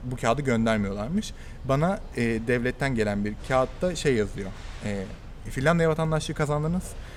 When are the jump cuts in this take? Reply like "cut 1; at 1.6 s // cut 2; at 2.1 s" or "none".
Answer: none